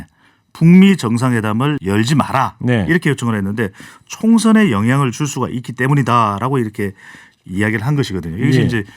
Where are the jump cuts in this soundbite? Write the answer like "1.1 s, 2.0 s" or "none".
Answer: 1.8 s